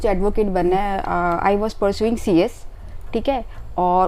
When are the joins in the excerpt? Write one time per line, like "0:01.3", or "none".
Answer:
none